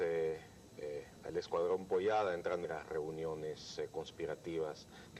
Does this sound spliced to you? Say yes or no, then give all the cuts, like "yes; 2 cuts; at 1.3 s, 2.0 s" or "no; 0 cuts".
no; 0 cuts